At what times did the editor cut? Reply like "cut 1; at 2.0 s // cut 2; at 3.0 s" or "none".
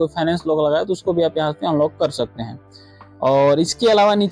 none